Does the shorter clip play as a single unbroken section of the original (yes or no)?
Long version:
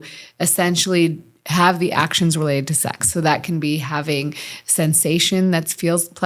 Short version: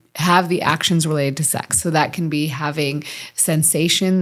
yes